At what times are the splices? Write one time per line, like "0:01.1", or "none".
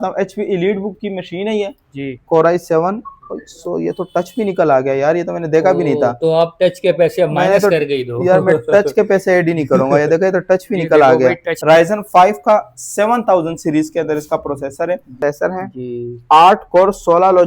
0:02.2
0:11.5
0:15.2